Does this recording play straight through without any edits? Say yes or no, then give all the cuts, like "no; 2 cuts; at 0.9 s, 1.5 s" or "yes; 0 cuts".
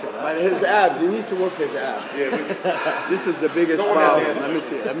yes; 0 cuts